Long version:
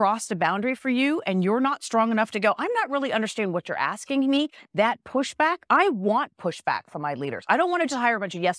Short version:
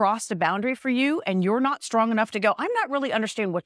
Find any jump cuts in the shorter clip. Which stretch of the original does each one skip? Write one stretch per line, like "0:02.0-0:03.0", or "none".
none